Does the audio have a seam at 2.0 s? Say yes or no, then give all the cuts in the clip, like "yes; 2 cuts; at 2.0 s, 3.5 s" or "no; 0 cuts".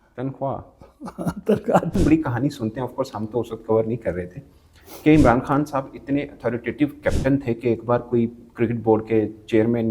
yes; 1 cut; at 2.0 s